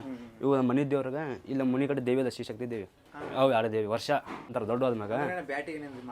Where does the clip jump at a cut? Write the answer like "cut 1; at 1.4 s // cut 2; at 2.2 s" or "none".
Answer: cut 1; at 4.6 s